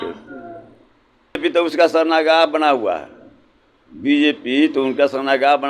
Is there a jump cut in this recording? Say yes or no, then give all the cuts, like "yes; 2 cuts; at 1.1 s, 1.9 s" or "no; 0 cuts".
yes; 1 cut; at 1.4 s